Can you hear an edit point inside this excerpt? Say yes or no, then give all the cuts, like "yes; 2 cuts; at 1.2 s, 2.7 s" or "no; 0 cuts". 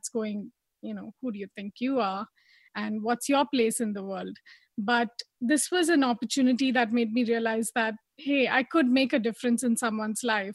no; 0 cuts